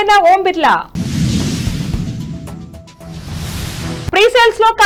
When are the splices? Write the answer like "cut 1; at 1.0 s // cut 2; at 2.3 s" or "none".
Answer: none